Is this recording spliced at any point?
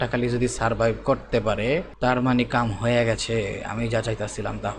yes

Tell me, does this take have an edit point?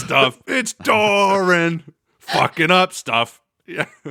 no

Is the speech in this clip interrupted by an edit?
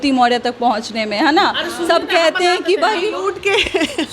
no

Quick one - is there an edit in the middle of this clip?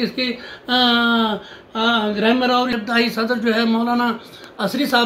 yes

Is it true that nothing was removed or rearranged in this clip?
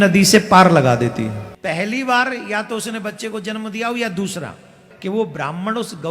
no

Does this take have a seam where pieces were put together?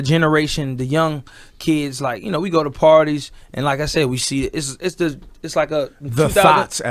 yes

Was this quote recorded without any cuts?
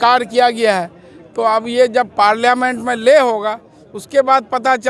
yes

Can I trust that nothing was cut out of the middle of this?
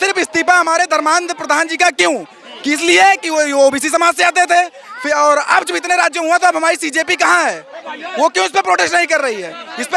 yes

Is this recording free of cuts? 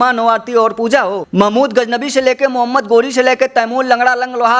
no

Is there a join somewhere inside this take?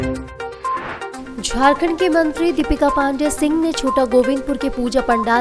yes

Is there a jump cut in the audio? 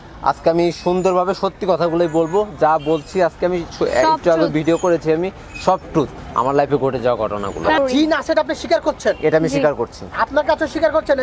yes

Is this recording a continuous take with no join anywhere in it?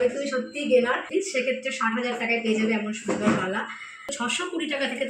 no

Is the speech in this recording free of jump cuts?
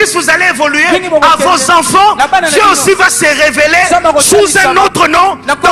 yes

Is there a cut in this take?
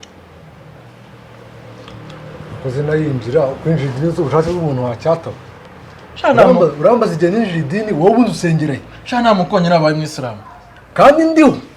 no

